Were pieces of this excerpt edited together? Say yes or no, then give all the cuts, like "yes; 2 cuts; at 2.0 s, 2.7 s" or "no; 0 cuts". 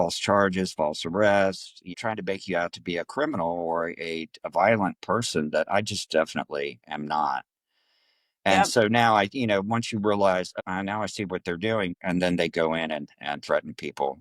yes; 2 cuts; at 1.9 s, 11.9 s